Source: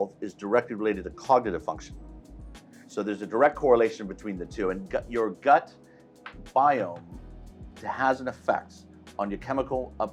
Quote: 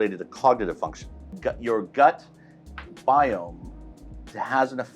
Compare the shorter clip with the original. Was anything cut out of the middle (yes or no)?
yes